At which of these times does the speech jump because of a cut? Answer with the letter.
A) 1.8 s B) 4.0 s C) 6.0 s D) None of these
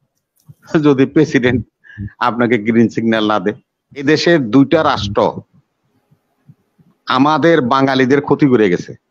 B